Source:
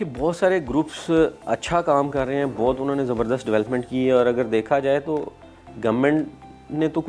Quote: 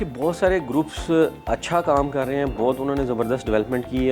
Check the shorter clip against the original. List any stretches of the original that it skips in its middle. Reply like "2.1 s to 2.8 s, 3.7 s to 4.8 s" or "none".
none